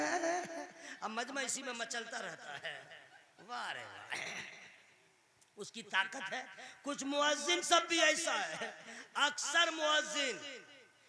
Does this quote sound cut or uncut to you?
uncut